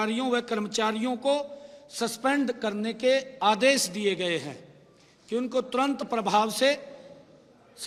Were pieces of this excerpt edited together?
no; 0 cuts

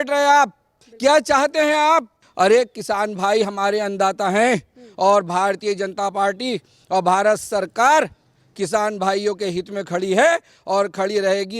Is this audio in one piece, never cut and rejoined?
no; 1 cut; at 2.2 s

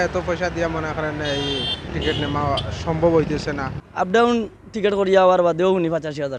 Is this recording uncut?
no; 2 cuts; at 1.9 s, 3.8 s

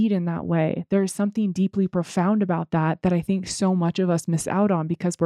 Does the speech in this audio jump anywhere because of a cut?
no; 0 cuts

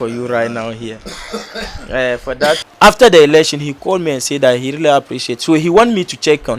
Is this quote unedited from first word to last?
no; 1 cut; at 2.6 s

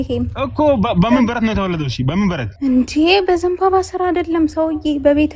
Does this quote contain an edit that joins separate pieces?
yes; 1 cut; at 2.5 s

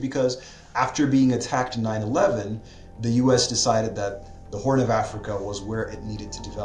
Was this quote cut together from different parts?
no; 0 cuts

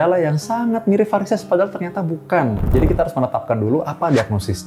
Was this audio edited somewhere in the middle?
yes; 1 cut; at 2.6 s

